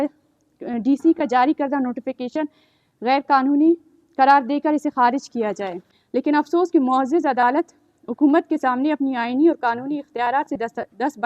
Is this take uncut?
no; 1 cut; at 5.8 s

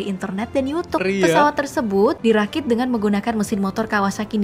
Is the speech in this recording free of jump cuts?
no; 2 cuts; at 1.0 s, 2.2 s

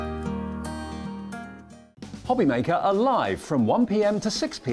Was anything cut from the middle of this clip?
yes; 1 cut; at 1.8 s

